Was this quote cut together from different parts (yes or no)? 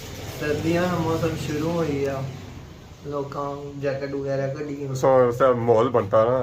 yes